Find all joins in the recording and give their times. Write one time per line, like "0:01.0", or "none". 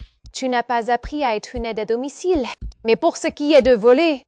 none